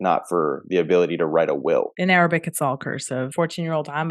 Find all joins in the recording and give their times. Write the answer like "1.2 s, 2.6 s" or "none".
1.9 s, 3.3 s